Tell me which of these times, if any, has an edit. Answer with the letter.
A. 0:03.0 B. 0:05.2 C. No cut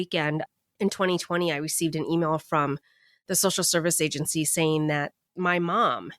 B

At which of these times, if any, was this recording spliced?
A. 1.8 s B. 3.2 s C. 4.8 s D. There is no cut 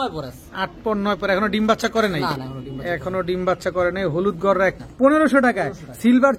C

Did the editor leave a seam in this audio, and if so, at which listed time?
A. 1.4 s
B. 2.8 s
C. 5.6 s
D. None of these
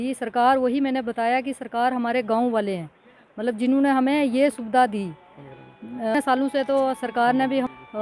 D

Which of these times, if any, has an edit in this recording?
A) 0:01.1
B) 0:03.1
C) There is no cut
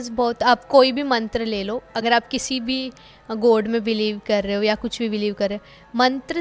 C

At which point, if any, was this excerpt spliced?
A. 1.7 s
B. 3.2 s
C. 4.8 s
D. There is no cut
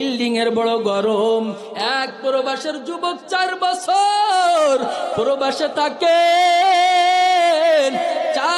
A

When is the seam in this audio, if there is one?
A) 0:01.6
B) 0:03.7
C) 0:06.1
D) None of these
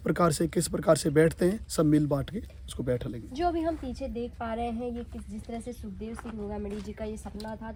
D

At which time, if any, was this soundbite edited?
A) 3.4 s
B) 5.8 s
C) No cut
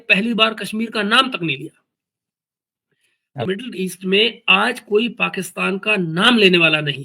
A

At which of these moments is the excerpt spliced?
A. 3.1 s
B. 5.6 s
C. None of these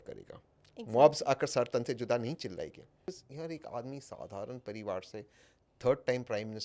A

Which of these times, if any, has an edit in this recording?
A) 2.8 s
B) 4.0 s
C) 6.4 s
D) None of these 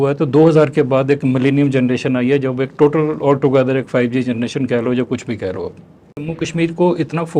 C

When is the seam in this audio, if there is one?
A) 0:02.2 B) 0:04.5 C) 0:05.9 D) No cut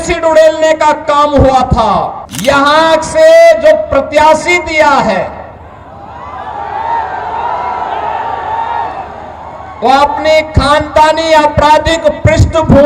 A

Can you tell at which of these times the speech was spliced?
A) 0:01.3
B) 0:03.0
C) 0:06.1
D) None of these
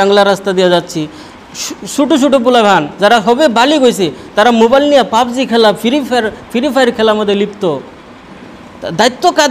D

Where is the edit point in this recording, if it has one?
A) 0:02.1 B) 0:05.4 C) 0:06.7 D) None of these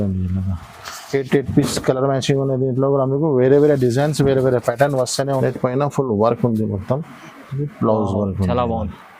B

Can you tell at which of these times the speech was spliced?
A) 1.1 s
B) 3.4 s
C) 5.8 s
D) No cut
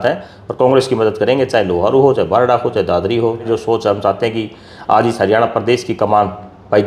B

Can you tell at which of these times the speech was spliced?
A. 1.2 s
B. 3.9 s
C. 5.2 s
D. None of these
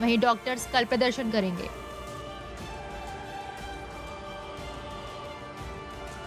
D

